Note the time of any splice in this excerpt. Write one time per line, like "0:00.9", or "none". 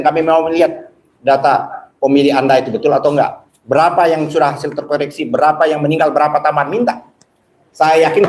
none